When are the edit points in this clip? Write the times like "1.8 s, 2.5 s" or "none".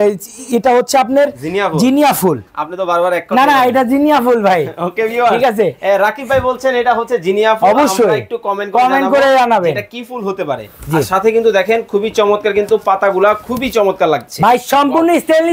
none